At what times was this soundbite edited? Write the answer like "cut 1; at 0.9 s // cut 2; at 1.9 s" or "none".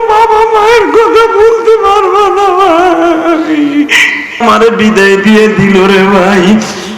cut 1; at 4.4 s